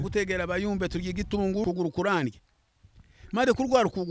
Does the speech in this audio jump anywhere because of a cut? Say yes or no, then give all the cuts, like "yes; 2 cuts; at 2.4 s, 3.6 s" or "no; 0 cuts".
yes; 1 cut; at 1.6 s